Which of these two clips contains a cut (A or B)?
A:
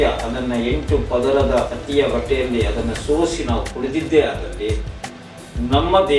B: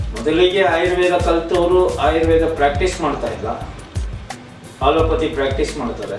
A